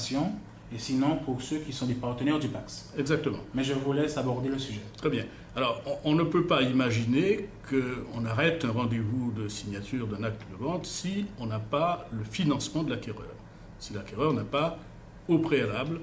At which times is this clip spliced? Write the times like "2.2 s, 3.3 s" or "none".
11.9 s